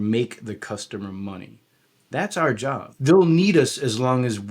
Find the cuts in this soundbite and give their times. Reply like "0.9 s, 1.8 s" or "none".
2.9 s